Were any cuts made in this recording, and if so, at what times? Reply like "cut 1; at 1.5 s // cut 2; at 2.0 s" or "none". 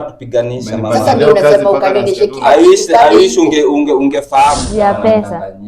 cut 1; at 4.6 s